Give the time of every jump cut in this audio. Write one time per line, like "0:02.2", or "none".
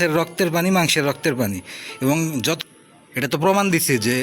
0:02.6